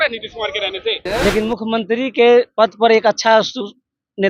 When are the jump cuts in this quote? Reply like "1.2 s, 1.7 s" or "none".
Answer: 1.0 s